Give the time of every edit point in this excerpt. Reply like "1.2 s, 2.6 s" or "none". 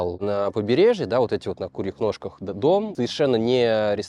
none